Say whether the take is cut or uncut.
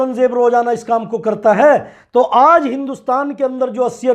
uncut